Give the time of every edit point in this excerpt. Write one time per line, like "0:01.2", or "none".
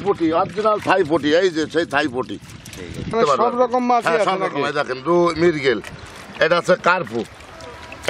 0:03.1

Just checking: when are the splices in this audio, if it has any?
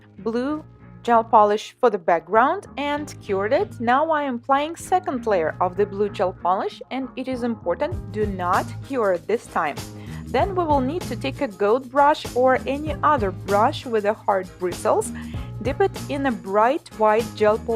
0:16.0

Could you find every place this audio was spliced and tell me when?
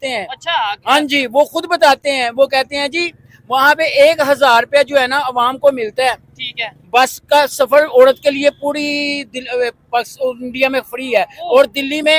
none

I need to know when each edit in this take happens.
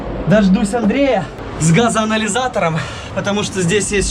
0:01.4

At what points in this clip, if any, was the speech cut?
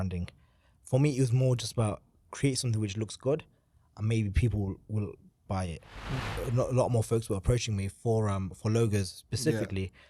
0:06.1

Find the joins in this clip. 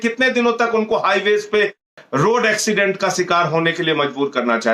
0:01.9

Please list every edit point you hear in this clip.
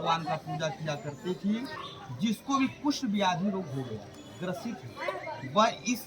0:01.8

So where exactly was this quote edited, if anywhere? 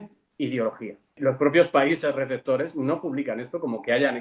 0:01.2

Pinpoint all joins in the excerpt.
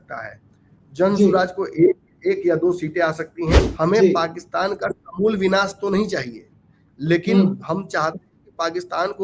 0:03.6

